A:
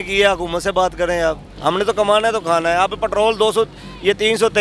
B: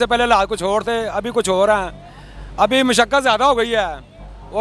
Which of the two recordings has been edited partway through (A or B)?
A